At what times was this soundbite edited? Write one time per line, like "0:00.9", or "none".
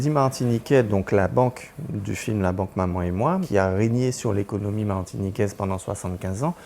0:03.5